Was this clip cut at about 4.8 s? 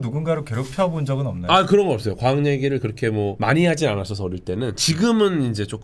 yes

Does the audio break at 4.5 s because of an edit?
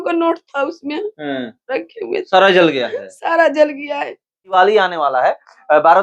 yes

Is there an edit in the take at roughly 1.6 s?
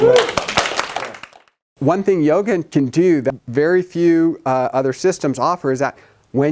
yes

